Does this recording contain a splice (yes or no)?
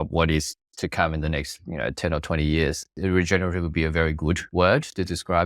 yes